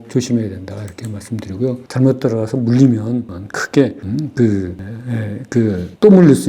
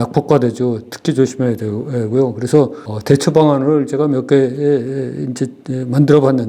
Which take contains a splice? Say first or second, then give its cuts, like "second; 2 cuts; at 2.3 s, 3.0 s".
first; 1 cut; at 1.8 s